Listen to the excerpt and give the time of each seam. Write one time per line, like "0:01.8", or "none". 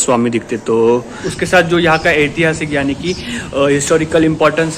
0:01.2